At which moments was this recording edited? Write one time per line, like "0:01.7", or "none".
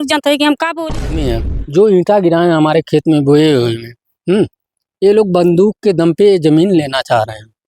0:01.3